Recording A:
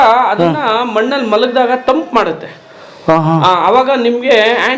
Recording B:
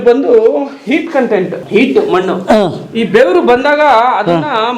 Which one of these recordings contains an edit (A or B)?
B